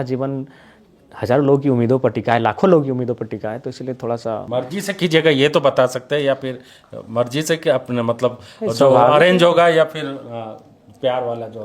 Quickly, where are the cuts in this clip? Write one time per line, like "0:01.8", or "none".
0:04.4